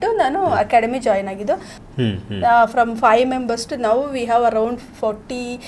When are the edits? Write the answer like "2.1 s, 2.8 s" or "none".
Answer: 1.8 s